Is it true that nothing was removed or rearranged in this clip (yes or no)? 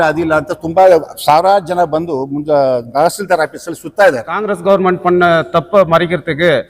no